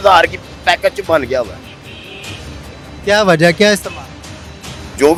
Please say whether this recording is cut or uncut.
uncut